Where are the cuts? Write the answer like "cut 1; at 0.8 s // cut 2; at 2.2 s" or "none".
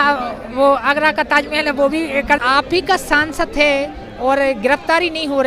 cut 1; at 2.4 s